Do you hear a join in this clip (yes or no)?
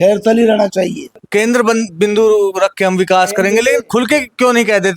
yes